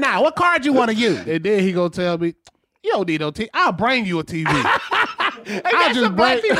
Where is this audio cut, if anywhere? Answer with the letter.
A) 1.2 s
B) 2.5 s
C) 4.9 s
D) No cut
A